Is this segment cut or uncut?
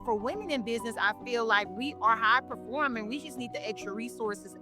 uncut